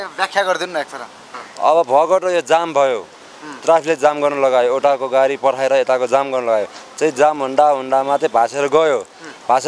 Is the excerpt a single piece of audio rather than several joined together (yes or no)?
yes